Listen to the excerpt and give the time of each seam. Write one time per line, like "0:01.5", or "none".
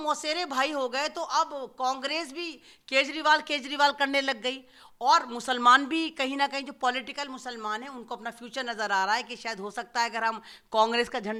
none